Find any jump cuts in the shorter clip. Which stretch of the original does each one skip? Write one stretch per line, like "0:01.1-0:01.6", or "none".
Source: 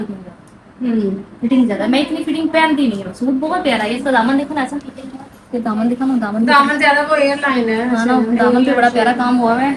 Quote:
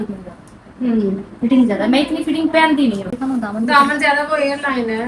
0:03.2-0:05.9